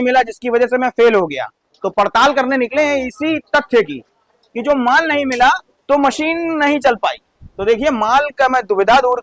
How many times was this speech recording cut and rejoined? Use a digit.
0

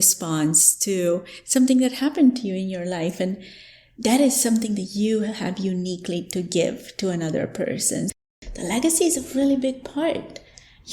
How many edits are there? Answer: 1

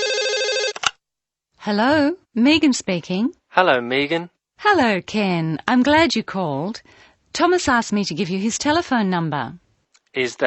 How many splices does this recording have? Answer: 1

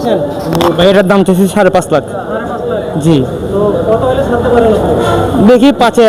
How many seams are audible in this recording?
0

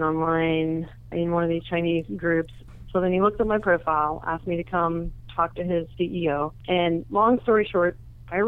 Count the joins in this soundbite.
3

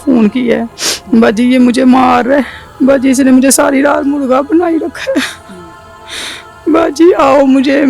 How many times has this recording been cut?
1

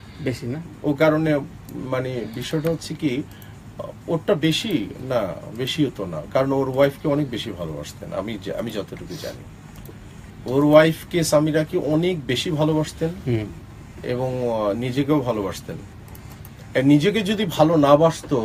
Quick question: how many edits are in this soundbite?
0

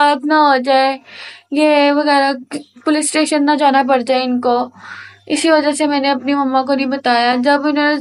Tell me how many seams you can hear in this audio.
0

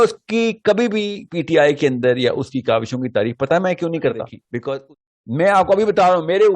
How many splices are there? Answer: 1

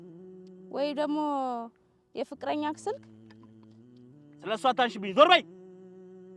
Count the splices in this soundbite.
1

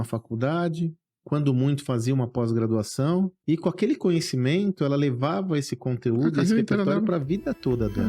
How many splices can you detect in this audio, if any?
1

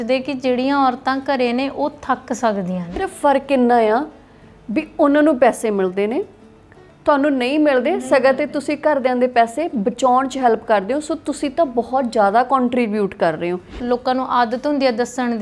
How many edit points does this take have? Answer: 2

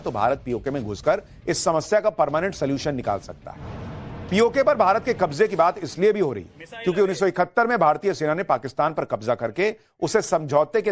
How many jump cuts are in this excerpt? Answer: 0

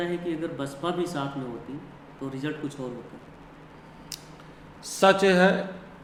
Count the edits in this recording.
0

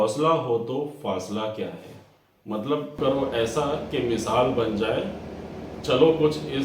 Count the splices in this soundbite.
1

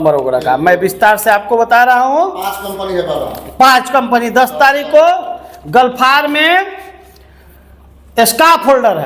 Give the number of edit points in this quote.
0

